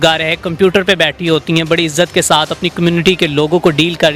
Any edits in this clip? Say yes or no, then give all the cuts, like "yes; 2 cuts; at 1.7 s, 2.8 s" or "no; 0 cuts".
no; 0 cuts